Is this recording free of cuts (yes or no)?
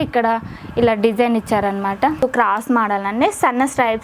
no